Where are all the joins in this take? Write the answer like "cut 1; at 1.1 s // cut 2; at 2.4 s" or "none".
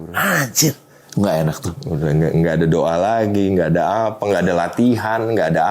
none